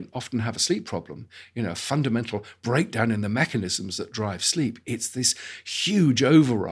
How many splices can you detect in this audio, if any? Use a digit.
0